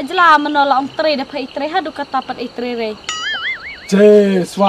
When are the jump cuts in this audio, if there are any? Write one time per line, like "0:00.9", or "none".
0:03.3